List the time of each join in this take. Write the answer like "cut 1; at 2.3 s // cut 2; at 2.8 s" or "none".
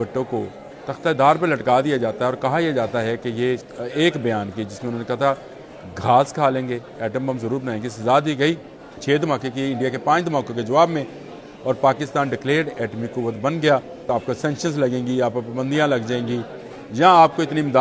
cut 1; at 3.6 s // cut 2; at 8.9 s // cut 3; at 14.1 s

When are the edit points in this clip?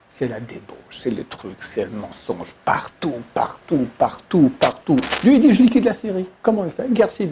cut 1; at 5.1 s

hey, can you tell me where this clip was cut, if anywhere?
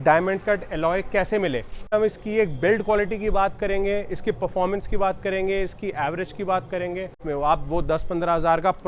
cut 1; at 1.9 s // cut 2; at 7.2 s

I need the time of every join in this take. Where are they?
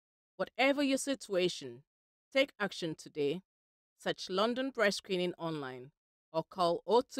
none

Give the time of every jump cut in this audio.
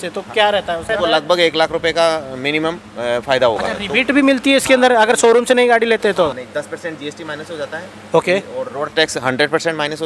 cut 1; at 0.9 s // cut 2; at 3.8 s // cut 3; at 6.4 s

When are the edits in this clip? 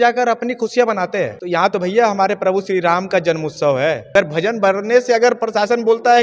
cut 1; at 1.4 s // cut 2; at 4.1 s

